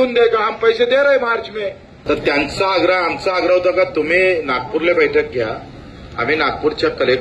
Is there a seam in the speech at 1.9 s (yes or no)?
yes